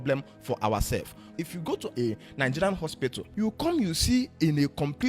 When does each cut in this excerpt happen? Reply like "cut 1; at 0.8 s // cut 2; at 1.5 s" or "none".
cut 1; at 1.4 s // cut 2; at 3.2 s